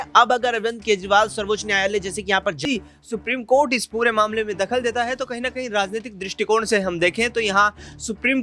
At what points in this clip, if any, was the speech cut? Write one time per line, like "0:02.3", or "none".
0:02.6